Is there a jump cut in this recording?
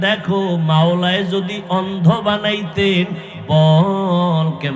no; 0 cuts

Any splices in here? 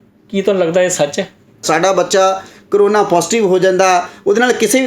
yes; 1 cut; at 1.6 s

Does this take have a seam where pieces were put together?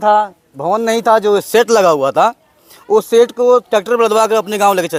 no; 0 cuts

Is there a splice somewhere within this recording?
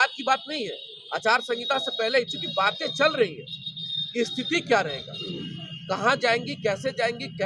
no; 0 cuts

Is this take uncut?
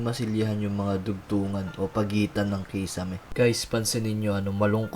no; 1 cut; at 3.2 s

